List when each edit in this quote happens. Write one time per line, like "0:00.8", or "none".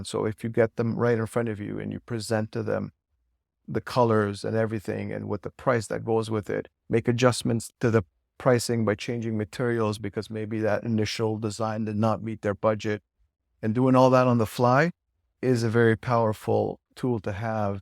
0:07.7
0:16.9